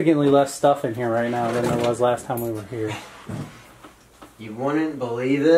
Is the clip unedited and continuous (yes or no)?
yes